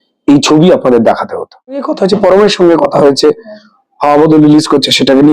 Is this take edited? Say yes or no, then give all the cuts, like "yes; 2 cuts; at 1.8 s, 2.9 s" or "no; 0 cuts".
yes; 1 cut; at 1.9 s